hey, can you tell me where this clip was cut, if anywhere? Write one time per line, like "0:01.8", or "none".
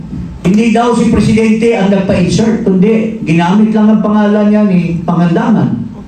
none

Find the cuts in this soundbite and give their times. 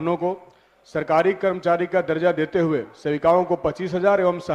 none

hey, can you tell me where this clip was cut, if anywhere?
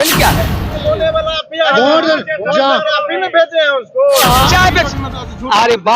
0:00.8
0:04.5

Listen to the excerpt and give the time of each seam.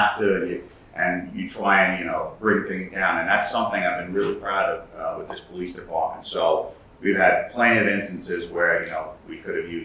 none

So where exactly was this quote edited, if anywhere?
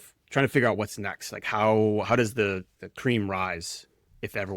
0:02.8

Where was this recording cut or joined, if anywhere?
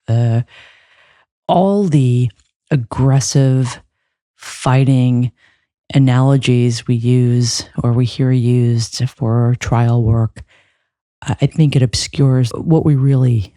0:12.5

